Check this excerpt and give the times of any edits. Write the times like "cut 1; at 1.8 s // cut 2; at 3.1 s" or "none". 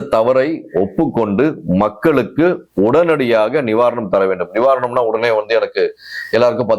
none